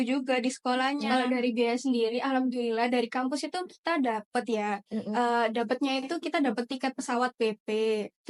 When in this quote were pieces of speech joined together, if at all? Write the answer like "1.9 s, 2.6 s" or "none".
1.1 s